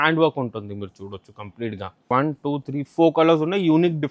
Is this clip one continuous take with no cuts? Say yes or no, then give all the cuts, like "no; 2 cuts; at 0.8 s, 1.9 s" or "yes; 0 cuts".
no; 1 cut; at 2.1 s